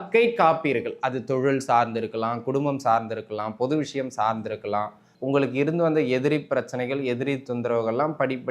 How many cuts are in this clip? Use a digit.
1